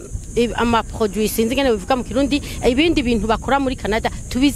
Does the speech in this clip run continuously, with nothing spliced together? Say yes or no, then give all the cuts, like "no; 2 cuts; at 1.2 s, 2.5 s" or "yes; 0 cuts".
yes; 0 cuts